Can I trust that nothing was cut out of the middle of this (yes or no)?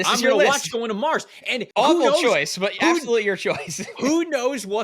no